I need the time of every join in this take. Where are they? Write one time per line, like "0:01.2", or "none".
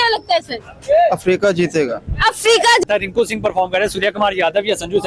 0:02.8